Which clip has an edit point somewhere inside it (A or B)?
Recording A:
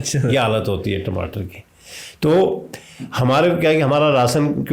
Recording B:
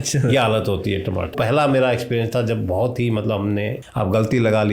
B